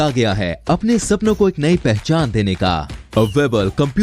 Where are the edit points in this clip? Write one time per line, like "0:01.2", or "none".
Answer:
none